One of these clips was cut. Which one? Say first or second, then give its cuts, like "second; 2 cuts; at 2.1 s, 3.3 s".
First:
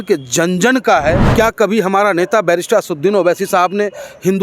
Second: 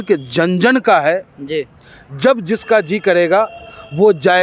first; 1 cut; at 1.3 s